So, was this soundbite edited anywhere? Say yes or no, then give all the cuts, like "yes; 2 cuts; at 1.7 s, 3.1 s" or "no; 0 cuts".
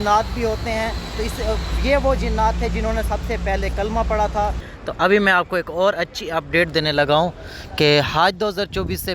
yes; 1 cut; at 4.7 s